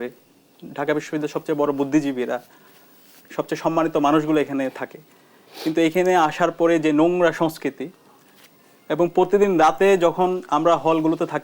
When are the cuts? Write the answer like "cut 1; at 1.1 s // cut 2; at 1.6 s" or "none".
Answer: none